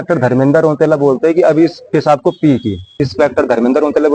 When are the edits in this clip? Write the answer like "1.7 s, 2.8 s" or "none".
2.9 s